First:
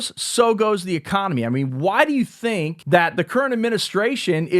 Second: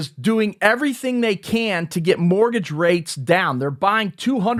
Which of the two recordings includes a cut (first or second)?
first